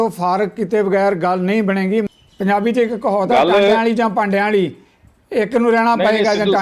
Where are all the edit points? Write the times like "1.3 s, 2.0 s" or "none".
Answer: 2.1 s